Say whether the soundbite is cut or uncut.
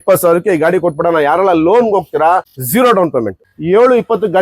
cut